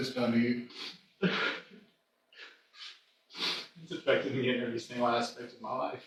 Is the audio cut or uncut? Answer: uncut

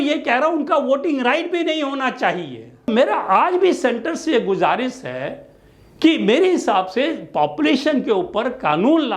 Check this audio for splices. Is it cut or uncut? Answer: cut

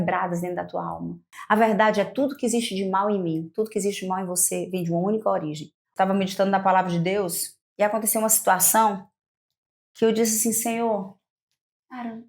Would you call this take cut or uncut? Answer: cut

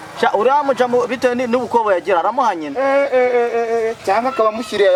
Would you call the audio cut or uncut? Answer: uncut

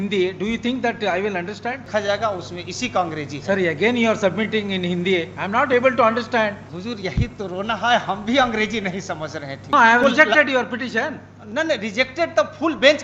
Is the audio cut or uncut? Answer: cut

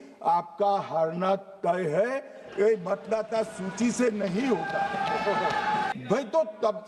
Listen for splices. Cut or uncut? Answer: cut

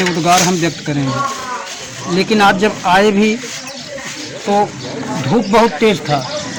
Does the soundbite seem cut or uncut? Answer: uncut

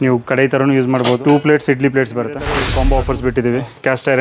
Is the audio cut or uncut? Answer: cut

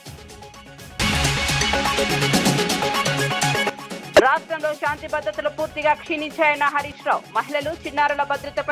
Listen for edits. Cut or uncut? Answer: cut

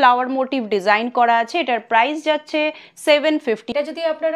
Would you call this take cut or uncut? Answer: uncut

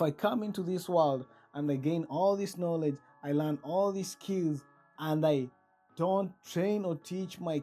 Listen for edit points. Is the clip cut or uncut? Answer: uncut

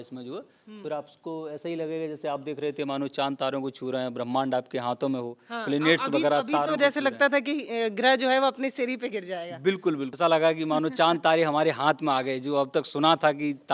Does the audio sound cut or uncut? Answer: cut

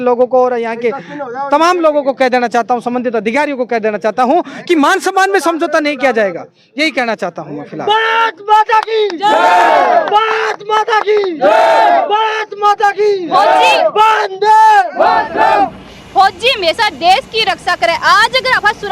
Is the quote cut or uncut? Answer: uncut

